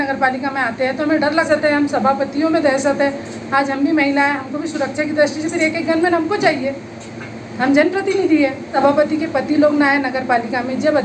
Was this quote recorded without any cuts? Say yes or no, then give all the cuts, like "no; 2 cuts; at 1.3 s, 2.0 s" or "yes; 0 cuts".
no; 2 cuts; at 1.5 s, 8.7 s